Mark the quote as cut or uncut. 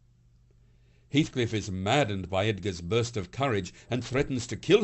uncut